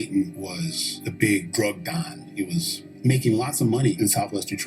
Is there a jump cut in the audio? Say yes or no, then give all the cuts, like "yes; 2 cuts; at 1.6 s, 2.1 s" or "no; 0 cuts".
no; 0 cuts